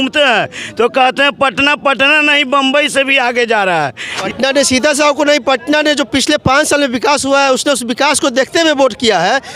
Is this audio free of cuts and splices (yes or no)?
no